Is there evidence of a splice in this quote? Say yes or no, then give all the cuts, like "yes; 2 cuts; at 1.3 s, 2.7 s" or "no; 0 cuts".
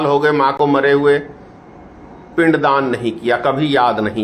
no; 0 cuts